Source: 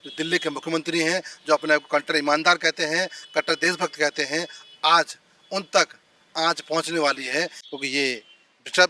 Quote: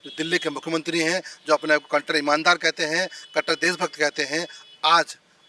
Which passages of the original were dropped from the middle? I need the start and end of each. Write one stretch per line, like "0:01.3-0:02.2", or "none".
none